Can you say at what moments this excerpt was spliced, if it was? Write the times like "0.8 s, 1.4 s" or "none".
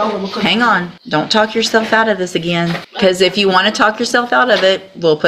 0.9 s, 2.8 s